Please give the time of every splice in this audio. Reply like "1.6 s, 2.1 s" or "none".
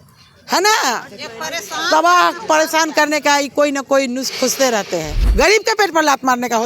5.2 s